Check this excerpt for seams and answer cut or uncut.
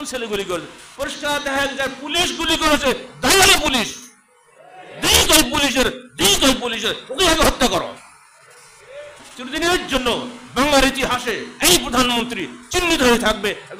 cut